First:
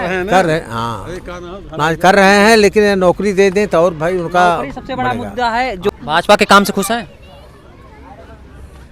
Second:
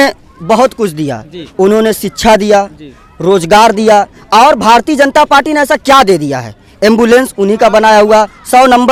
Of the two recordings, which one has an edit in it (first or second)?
first